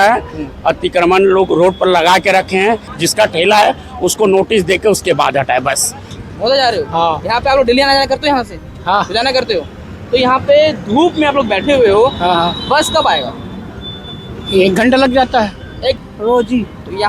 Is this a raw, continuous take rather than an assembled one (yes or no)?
no